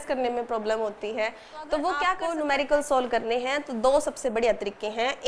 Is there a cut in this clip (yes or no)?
yes